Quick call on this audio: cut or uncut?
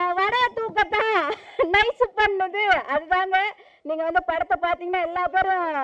uncut